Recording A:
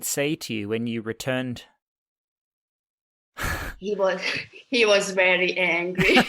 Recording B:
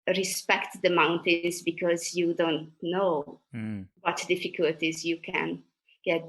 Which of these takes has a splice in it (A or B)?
B